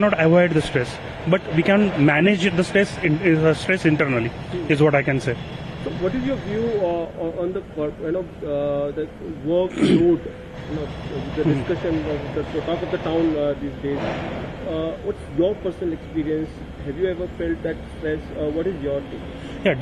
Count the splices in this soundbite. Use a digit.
0